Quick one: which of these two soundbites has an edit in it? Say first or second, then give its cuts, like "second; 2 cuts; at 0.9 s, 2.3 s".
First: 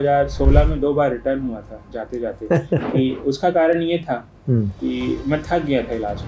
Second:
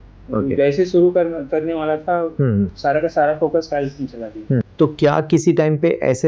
second; 1 cut; at 4.6 s